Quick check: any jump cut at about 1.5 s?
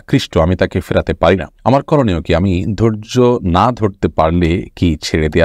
yes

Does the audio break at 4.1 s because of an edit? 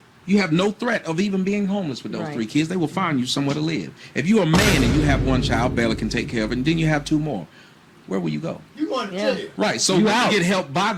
no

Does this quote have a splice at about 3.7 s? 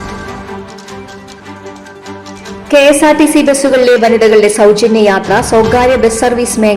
no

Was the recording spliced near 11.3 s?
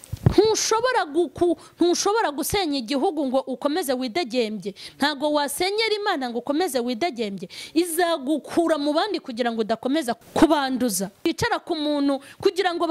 yes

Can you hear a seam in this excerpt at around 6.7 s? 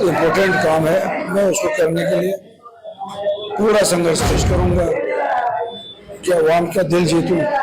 no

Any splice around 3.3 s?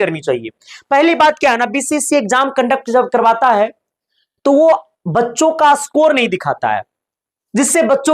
no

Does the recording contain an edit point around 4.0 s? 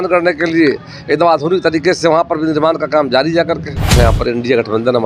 yes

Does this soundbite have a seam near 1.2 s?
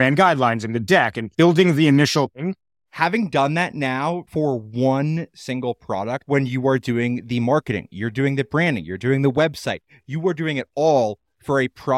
yes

